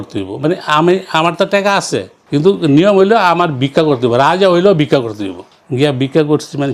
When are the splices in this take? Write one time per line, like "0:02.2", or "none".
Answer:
none